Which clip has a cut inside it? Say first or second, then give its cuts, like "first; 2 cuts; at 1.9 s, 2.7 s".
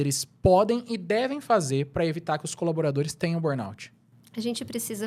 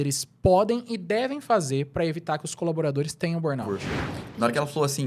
second; 1 cut; at 3.7 s